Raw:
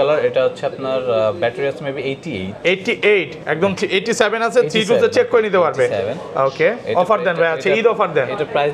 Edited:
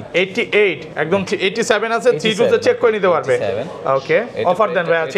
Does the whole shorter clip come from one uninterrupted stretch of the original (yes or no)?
yes